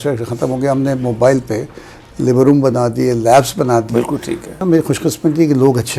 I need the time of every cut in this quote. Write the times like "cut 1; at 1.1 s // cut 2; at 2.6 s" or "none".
cut 1; at 4.6 s